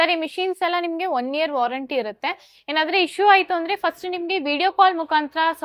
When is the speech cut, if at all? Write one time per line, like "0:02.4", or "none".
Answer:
none